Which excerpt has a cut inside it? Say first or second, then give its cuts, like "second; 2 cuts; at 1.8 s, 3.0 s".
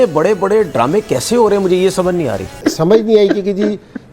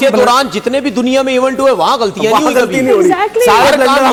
first; 1 cut; at 2.5 s